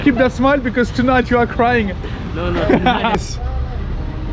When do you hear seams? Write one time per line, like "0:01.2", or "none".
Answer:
0:03.2